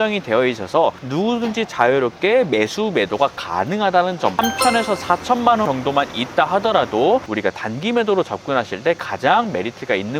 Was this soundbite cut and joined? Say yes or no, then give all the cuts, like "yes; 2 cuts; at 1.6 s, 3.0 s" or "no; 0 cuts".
yes; 2 cuts; at 4.4 s, 7.2 s